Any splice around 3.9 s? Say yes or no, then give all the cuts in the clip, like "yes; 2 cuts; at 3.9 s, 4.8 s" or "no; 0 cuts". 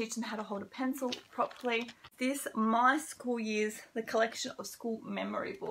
no; 1 cut; at 2.1 s